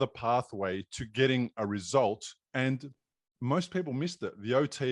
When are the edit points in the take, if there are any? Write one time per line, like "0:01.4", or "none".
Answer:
0:02.3